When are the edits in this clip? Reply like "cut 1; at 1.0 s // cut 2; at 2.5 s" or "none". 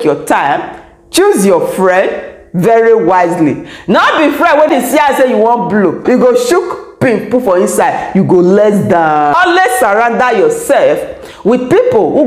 cut 1; at 4.7 s // cut 2; at 6.0 s // cut 3; at 9.3 s